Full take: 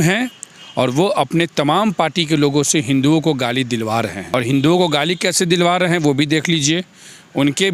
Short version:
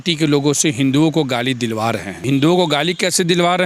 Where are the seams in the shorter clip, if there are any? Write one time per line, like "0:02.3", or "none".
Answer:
0:02.2